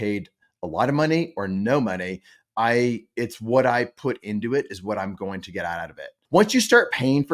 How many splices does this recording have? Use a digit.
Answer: 1